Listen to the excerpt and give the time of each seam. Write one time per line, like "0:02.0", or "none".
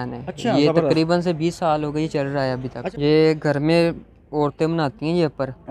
0:02.8